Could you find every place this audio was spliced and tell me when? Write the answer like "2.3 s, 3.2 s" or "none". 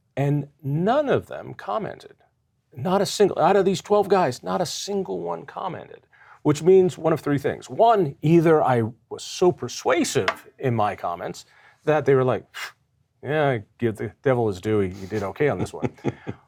none